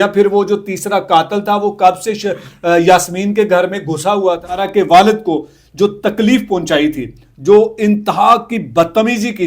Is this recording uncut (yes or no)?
no